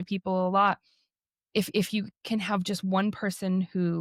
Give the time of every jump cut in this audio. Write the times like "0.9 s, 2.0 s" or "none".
none

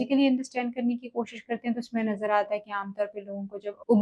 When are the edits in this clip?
none

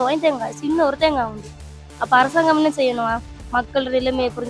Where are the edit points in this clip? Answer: none

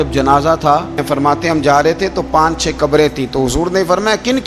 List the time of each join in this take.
1.0 s

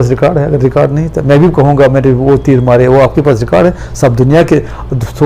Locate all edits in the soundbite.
none

